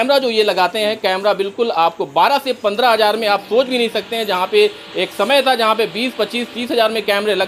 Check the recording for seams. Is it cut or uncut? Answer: uncut